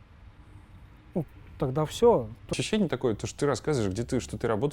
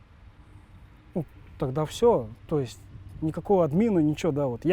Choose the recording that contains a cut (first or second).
first